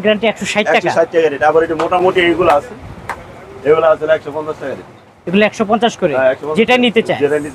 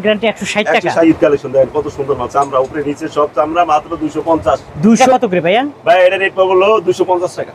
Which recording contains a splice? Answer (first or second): second